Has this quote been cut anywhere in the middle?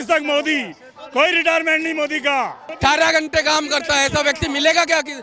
yes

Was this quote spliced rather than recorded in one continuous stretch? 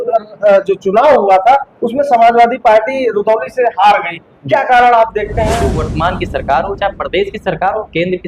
yes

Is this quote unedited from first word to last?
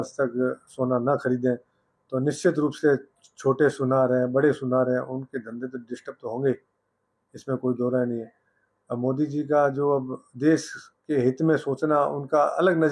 yes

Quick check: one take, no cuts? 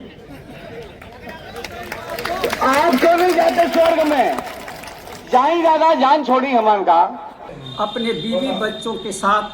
no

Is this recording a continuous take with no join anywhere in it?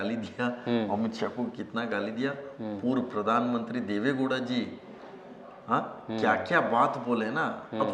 yes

